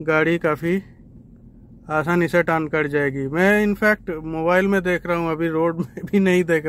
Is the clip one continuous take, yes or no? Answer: yes